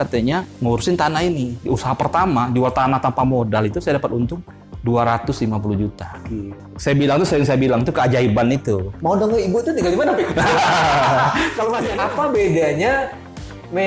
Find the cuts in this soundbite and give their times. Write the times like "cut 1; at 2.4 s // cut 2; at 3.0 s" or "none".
cut 1; at 1.6 s // cut 2; at 6.5 s // cut 3; at 8.9 s // cut 4; at 11.9 s